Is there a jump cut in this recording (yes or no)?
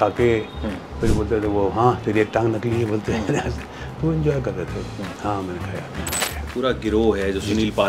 yes